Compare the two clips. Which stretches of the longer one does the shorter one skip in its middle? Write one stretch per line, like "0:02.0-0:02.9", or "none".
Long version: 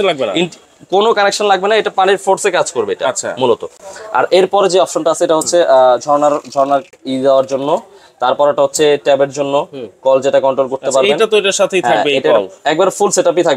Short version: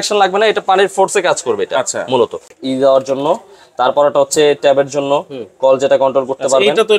0:03.8-0:07.0